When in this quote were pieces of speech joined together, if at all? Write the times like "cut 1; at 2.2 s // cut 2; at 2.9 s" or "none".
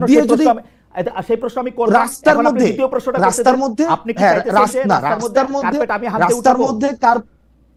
none